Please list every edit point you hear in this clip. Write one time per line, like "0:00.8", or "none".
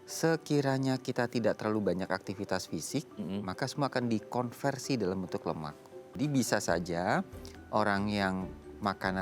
0:06.2